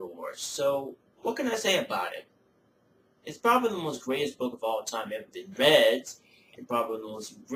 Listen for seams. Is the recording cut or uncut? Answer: uncut